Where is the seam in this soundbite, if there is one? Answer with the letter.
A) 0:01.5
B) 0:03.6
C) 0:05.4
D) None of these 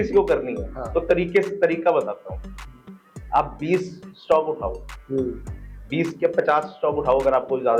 D